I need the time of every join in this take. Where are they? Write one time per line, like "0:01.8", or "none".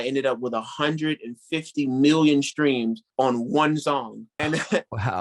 0:03.0
0:04.2